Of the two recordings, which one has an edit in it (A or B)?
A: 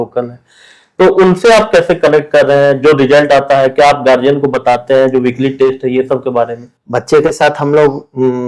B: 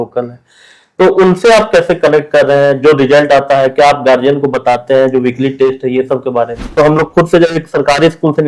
B